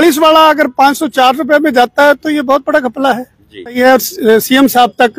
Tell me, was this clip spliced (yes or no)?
yes